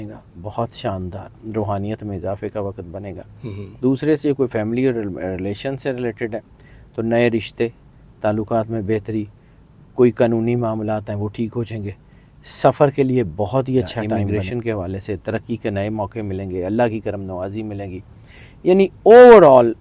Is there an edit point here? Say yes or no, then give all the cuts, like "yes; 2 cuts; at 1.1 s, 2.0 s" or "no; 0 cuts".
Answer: yes; 1 cut; at 14.2 s